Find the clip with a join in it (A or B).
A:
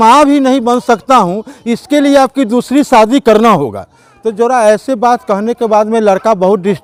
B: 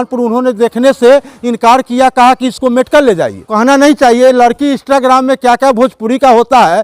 B